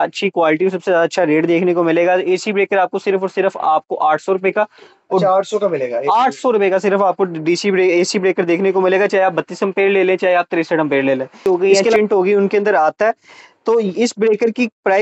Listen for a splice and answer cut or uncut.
cut